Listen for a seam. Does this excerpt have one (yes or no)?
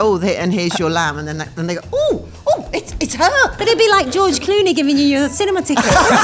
yes